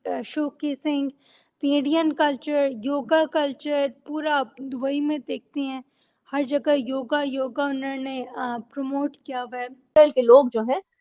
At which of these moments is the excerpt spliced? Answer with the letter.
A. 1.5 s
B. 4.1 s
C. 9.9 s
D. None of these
C